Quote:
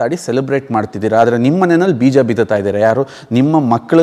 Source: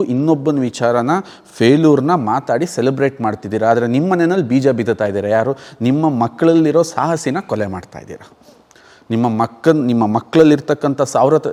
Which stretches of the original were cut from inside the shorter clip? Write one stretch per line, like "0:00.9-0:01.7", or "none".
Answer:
none